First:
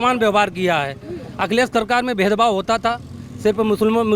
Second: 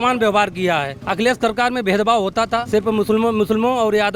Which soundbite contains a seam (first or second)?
second